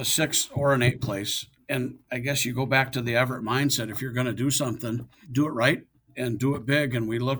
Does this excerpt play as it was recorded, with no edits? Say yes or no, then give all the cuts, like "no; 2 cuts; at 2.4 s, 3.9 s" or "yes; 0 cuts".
no; 3 cuts; at 1.7 s, 5.2 s, 6.1 s